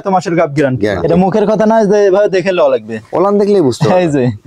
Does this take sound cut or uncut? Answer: cut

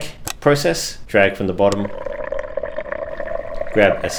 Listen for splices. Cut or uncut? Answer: uncut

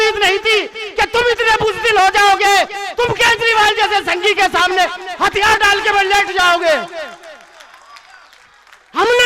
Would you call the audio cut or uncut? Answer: uncut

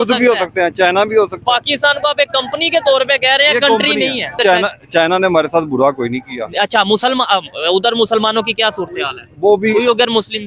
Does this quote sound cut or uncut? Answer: cut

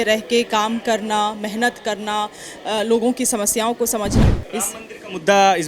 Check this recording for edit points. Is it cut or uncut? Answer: cut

